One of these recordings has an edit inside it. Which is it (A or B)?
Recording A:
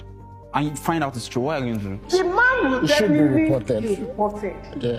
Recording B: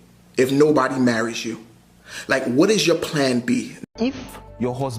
B